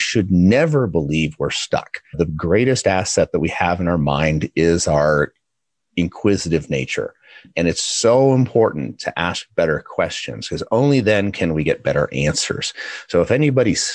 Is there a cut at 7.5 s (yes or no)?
yes